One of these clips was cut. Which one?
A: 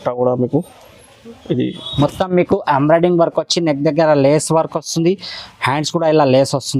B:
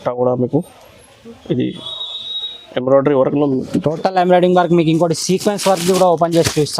A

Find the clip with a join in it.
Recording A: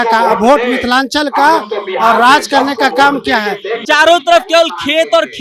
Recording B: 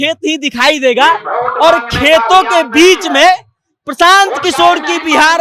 A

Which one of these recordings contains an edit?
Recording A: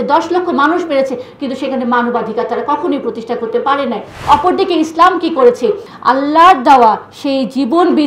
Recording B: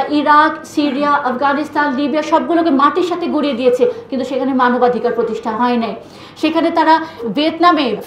A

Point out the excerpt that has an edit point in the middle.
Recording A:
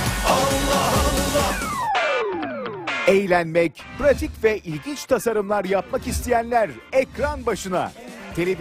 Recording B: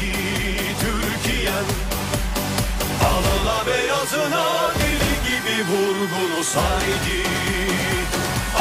A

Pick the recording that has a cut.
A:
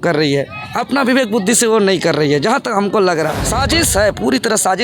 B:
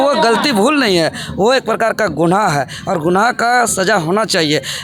A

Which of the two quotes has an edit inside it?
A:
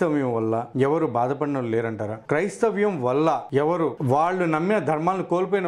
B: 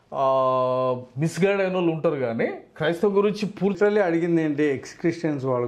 B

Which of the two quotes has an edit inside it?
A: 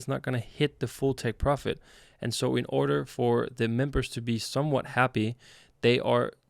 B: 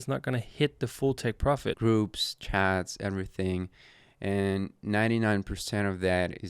B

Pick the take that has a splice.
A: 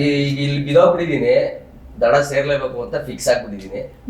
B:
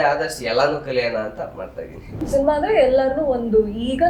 B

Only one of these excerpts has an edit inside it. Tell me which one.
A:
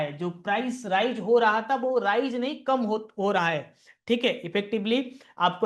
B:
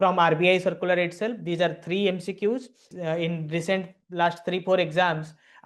B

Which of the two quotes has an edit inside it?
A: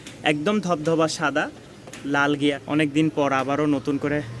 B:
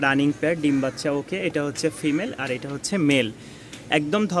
A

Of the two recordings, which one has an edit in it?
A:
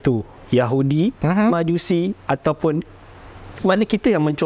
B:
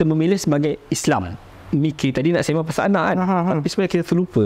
B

